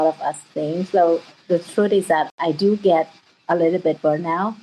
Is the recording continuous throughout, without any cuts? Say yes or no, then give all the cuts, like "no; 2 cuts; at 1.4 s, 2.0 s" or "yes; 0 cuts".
yes; 0 cuts